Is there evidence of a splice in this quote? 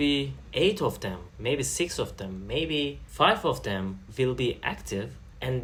no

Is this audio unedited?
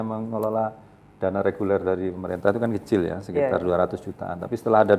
yes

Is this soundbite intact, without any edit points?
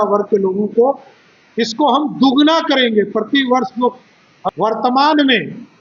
no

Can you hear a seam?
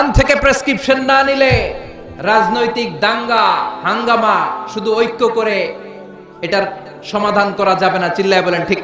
no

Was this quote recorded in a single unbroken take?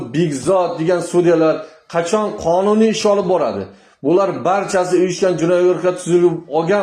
yes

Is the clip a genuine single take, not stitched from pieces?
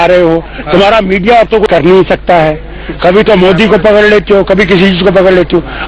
no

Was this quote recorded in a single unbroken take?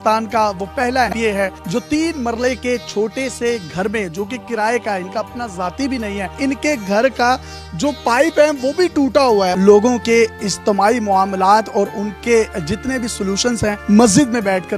no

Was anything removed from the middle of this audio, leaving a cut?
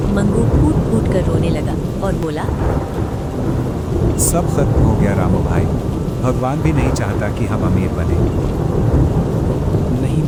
no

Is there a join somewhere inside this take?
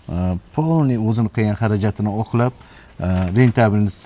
no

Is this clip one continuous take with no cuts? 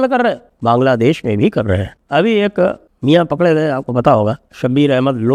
yes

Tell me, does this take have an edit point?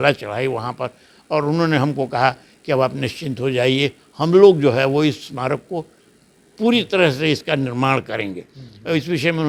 no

